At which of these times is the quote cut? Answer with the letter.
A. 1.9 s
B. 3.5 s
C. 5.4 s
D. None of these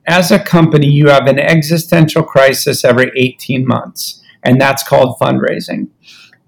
D